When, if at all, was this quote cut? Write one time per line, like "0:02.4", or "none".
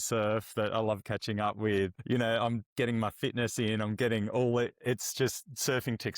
0:01.9